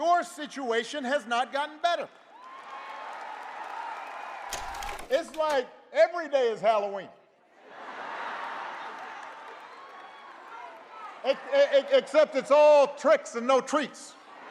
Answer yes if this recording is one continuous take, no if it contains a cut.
no